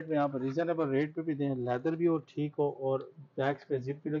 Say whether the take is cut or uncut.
uncut